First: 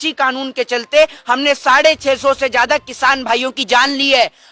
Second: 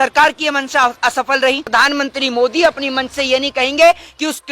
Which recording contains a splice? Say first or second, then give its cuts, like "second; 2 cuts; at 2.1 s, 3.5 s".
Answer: second; 1 cut; at 1.7 s